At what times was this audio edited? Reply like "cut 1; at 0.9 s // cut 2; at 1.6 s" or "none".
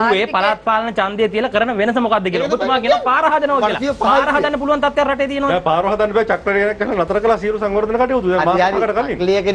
none